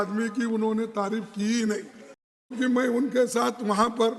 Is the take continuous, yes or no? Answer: no